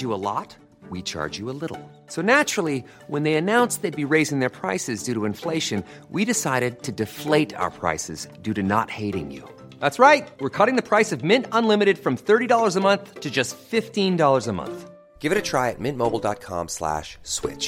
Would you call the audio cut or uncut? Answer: uncut